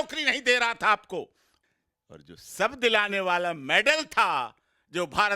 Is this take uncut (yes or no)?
yes